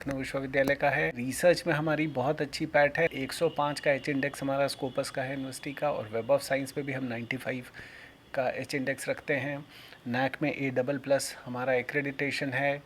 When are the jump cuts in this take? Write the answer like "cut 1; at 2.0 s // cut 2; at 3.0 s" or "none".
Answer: cut 1; at 1.3 s // cut 2; at 3.1 s